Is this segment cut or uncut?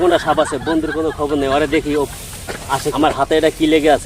cut